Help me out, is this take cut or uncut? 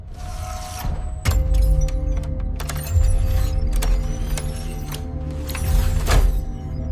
uncut